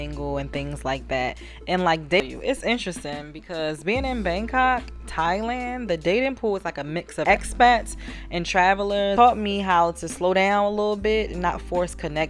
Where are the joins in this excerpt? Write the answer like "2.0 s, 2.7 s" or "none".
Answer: 2.2 s, 9.1 s